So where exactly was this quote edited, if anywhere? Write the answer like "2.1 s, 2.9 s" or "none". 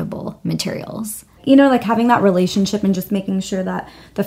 1.4 s